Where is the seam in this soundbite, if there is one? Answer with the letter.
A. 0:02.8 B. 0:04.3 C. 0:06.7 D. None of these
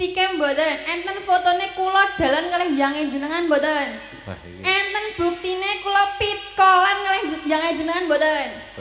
D